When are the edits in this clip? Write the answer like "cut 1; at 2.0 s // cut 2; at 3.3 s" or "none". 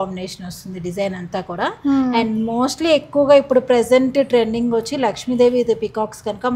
none